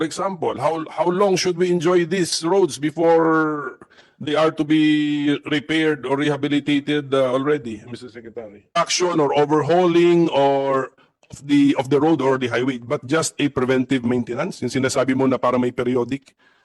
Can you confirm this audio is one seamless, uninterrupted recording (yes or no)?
no